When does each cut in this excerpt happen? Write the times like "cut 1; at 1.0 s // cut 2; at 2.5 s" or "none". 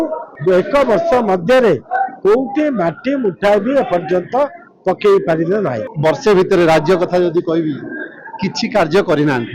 cut 1; at 5.8 s